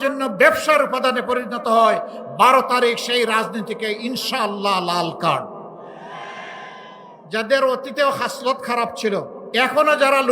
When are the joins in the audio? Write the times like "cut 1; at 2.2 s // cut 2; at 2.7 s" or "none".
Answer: cut 1; at 7.2 s // cut 2; at 9.4 s